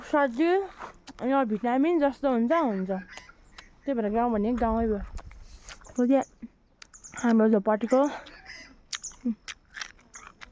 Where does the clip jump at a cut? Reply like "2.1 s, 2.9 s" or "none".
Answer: none

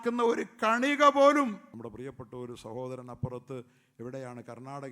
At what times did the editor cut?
1.7 s

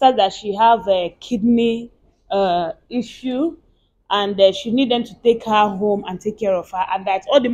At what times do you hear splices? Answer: none

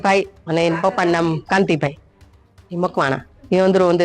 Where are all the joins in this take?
none

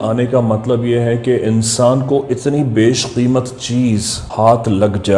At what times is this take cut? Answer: 4.2 s

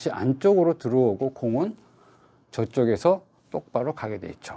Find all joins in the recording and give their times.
none

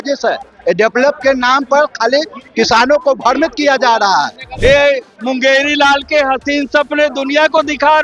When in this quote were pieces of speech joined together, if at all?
4.4 s

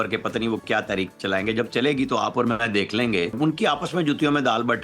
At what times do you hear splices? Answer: 3.4 s

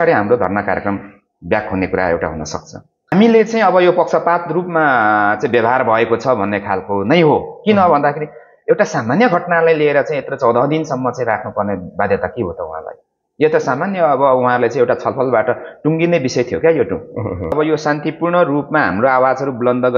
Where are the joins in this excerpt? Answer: 3.1 s, 17.5 s

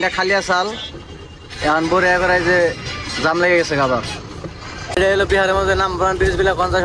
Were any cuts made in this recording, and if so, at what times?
5.0 s

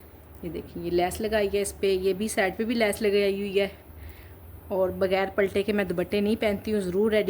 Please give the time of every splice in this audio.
none

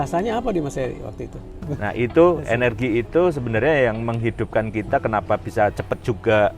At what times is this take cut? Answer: 1.7 s

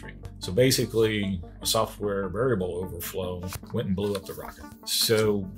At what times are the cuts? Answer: none

